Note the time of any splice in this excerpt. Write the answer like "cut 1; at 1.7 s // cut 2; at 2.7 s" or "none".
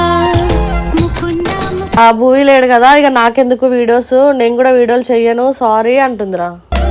cut 1; at 2.0 s